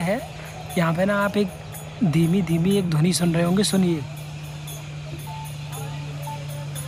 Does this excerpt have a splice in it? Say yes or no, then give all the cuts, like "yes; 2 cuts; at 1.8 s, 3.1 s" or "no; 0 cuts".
no; 0 cuts